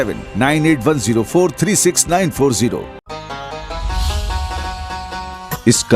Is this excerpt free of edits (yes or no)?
no